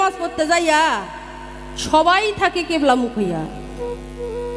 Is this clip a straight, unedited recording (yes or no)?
yes